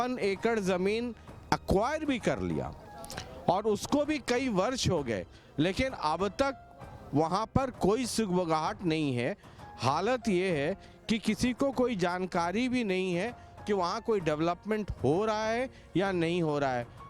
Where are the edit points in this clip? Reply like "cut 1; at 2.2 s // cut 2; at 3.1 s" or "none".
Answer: none